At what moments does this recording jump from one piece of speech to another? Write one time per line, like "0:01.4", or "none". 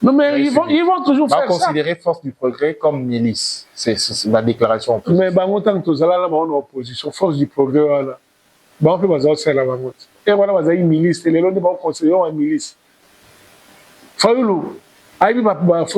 0:13.0